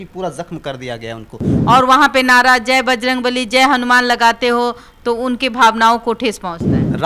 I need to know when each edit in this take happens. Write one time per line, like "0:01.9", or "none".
0:01.5